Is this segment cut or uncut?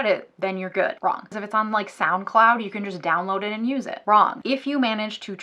cut